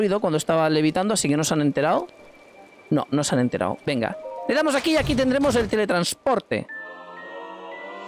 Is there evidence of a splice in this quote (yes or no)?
no